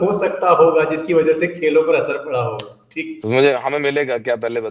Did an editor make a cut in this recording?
no; 0 cuts

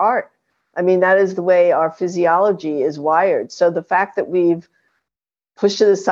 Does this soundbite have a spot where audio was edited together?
no; 0 cuts

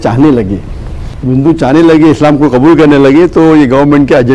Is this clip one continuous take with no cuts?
yes; 0 cuts

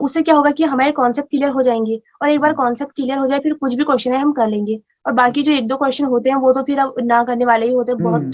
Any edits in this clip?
no; 0 cuts

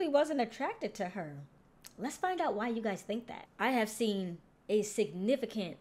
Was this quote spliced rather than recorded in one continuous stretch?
yes; 1 cut; at 3.3 s

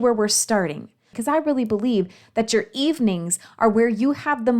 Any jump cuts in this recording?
yes; 1 cut; at 1.1 s

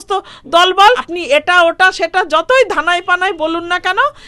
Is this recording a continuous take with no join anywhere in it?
no; 1 cut; at 1.1 s

